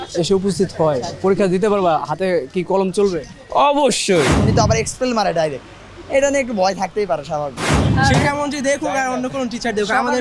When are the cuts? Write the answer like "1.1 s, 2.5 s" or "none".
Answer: 4.4 s, 7.9 s